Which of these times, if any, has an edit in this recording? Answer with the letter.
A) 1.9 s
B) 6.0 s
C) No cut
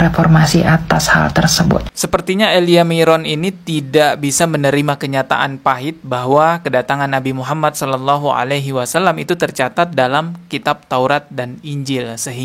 A